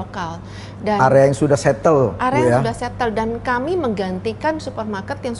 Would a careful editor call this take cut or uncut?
uncut